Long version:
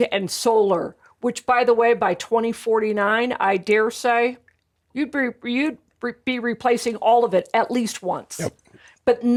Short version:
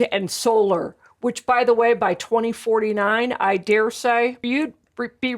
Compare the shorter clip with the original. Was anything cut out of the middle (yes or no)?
yes